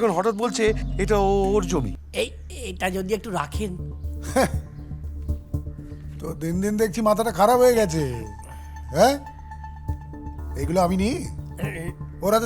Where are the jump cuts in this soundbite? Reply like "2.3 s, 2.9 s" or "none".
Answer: 2.0 s